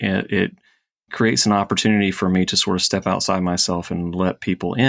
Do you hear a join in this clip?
no; 0 cuts

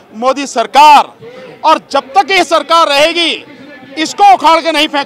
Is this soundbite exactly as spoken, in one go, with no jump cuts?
yes; 0 cuts

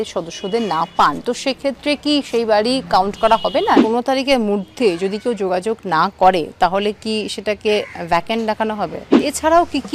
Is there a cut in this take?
yes; 2 cuts; at 3.8 s, 9.1 s

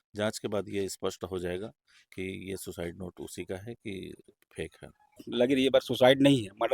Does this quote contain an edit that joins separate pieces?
yes; 1 cut; at 5.1 s

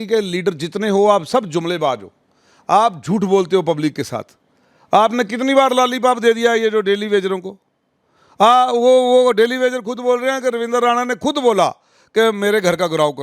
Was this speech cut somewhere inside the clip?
no; 0 cuts

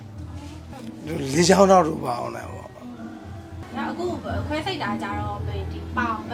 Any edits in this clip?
no; 0 cuts

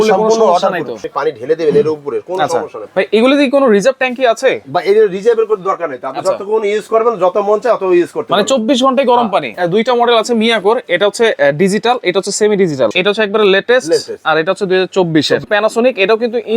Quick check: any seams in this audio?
yes; 5 cuts; at 1.0 s, 2.8 s, 9.5 s, 12.9 s, 15.5 s

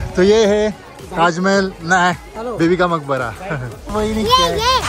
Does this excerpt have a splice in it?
yes; 1 cut; at 3.9 s

